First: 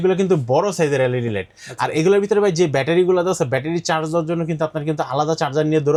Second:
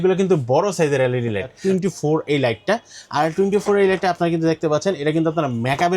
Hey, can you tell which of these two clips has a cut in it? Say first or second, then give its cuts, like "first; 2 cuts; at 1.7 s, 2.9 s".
second; 1 cut; at 1.5 s